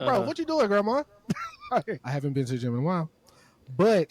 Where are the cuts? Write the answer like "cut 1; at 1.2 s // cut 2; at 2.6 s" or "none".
cut 1; at 2.0 s